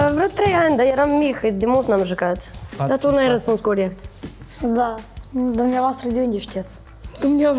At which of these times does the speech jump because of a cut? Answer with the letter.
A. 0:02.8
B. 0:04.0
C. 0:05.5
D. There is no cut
A